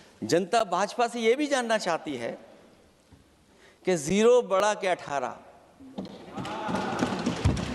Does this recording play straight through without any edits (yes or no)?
yes